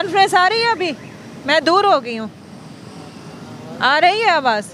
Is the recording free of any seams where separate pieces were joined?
yes; 0 cuts

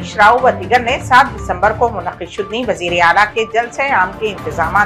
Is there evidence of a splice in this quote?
no; 0 cuts

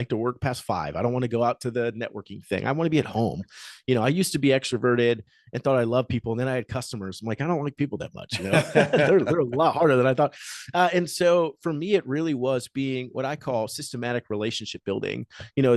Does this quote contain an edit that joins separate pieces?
no; 0 cuts

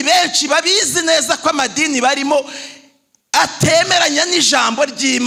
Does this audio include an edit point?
no; 0 cuts

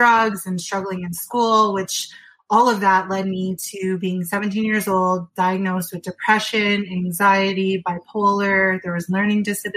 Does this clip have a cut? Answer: no; 0 cuts

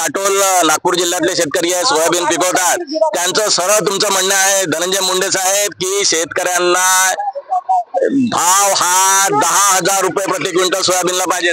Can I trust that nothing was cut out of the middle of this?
yes; 0 cuts

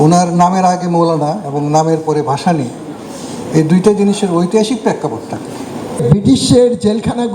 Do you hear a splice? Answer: yes; 1 cut; at 6.0 s

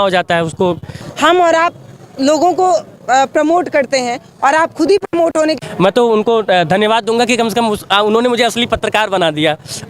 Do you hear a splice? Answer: yes; 2 cuts; at 1.0 s, 5.6 s

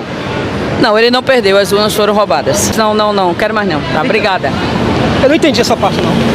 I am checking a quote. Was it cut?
yes; 1 cut; at 2.7 s

